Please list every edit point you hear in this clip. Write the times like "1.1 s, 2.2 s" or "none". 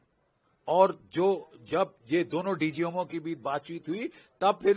none